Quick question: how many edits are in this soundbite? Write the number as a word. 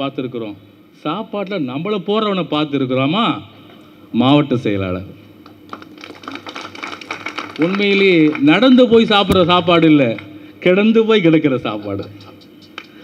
zero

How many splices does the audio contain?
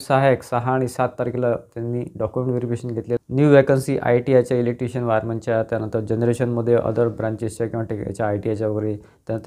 one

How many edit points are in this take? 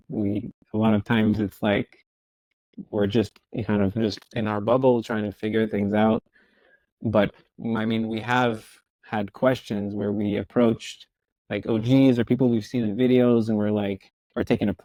zero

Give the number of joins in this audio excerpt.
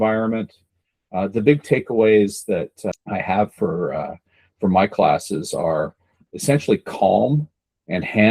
one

